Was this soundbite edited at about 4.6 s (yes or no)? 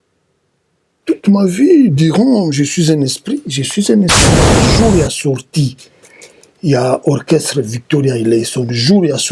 yes